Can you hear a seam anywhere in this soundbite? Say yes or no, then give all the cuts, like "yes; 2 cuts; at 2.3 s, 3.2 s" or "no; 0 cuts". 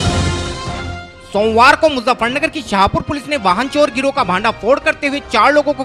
no; 0 cuts